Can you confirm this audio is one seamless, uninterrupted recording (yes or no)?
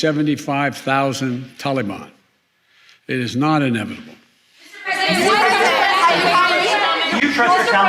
yes